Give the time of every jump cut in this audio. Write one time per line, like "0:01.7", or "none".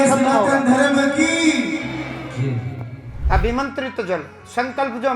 0:03.1